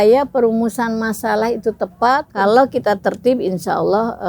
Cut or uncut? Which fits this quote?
cut